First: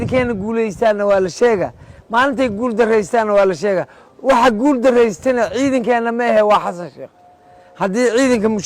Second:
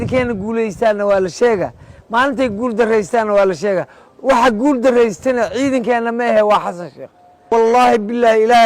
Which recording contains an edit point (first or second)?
second